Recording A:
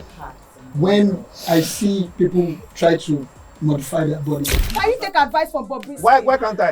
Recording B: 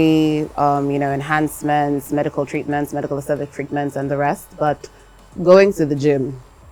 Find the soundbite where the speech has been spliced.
A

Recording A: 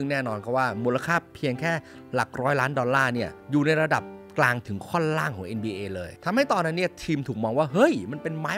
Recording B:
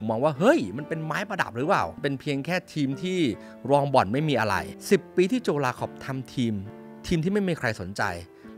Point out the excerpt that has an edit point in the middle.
B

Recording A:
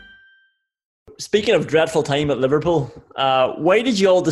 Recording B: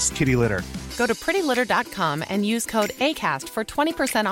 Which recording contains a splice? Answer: A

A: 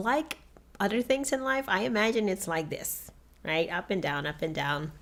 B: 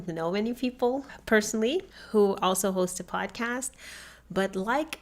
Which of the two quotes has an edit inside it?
B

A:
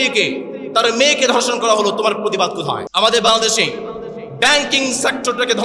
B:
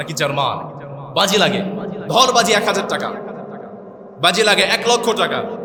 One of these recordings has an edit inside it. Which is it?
A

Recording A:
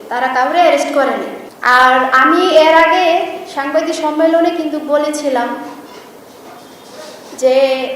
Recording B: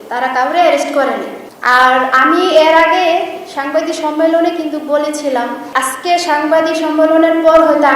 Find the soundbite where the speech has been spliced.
B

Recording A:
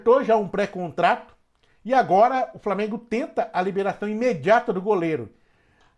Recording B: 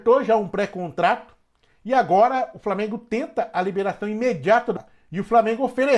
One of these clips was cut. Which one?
B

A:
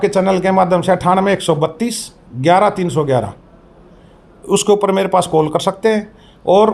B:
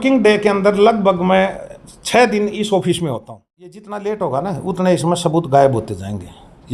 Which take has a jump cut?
B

